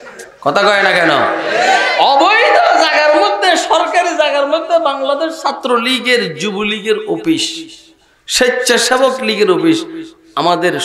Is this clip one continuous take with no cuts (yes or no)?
yes